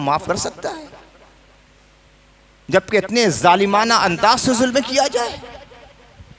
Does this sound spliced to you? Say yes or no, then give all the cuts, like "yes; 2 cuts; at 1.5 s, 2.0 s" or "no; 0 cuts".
no; 0 cuts